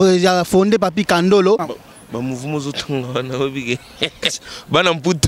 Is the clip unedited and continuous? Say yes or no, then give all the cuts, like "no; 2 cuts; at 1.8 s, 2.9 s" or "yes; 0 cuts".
no; 1 cut; at 1.7 s